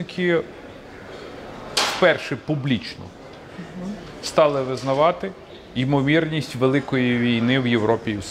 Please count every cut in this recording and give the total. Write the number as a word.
zero